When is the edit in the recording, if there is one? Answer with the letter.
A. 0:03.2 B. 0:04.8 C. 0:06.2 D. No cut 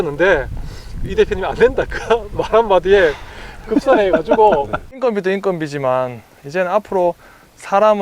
B